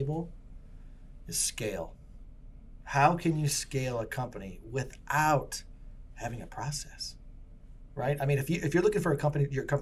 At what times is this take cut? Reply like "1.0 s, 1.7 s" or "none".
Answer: none